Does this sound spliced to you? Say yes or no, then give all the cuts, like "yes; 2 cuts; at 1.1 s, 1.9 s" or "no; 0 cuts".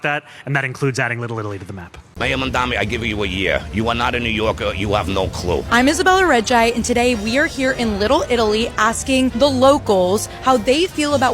yes; 1 cut; at 2.1 s